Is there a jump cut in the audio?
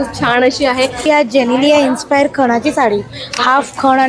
yes; 1 cut; at 1.1 s

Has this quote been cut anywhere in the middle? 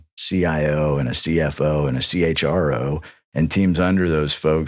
no; 0 cuts

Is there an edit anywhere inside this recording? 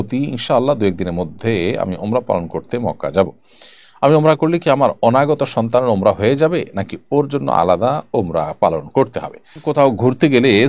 yes; 1 cut; at 9.6 s

